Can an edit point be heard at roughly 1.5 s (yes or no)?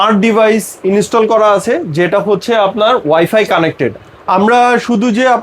no